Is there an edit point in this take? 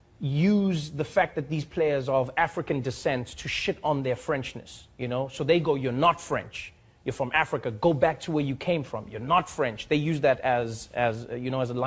no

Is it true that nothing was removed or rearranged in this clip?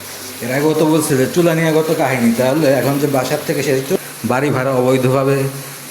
no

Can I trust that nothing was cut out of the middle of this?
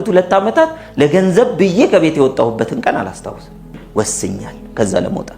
no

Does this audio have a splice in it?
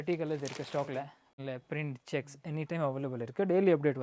yes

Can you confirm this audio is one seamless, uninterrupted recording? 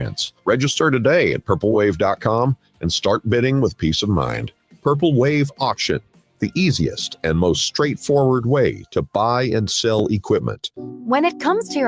no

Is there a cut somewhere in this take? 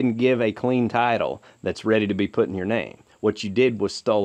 no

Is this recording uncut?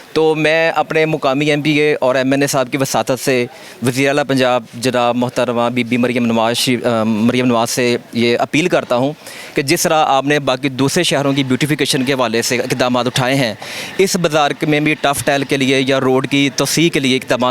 yes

